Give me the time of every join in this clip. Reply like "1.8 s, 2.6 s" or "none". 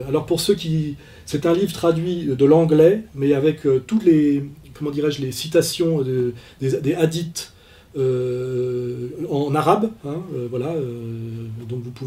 8.7 s